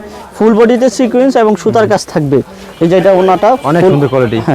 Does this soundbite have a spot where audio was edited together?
yes; 1 cut; at 2.6 s

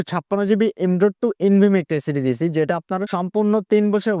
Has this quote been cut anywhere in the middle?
no; 0 cuts

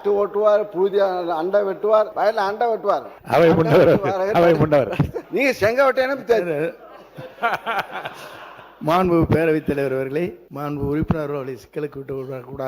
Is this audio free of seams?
no; 4 cuts; at 2.1 s, 3.1 s, 5.2 s, 10.5 s

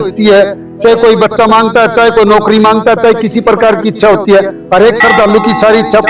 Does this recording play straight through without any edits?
yes; 0 cuts

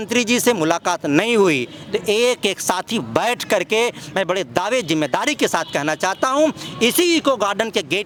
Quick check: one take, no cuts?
yes; 0 cuts

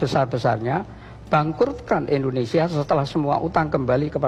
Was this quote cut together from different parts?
no; 0 cuts

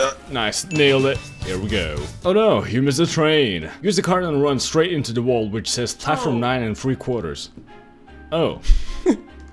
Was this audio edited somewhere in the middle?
no; 0 cuts

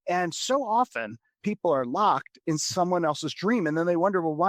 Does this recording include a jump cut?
no; 0 cuts

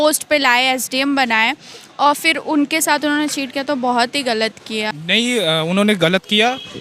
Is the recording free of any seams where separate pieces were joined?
yes; 0 cuts

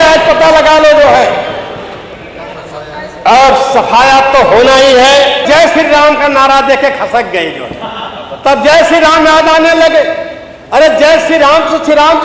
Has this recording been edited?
yes; 1 cut; at 5.4 s

